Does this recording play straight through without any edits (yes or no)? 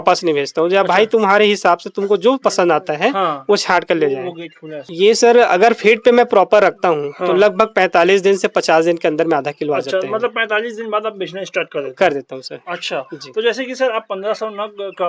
yes